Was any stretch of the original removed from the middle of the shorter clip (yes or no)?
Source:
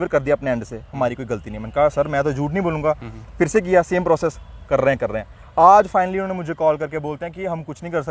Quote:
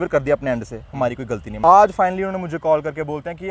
yes